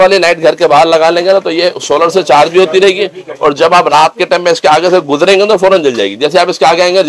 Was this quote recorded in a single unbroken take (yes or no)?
yes